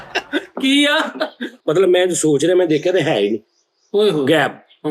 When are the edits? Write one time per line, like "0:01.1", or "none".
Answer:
0:01.5